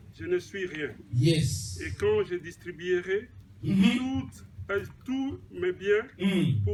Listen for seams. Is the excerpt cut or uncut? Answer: uncut